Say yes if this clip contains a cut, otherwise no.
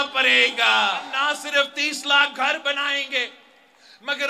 yes